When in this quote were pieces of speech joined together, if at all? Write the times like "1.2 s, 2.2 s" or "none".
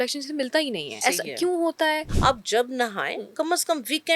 1.0 s, 2.1 s